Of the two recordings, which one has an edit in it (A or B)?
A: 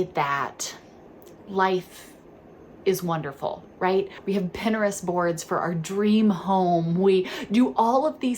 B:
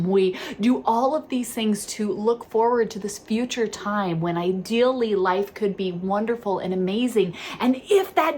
A